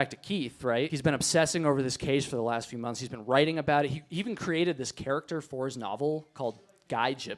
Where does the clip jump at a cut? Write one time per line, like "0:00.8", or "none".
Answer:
0:00.9